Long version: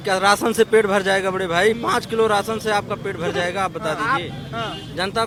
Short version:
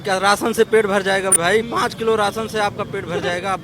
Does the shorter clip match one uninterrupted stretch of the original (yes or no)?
no